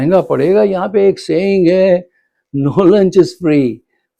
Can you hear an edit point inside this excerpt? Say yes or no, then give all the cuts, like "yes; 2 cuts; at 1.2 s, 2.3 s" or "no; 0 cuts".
no; 0 cuts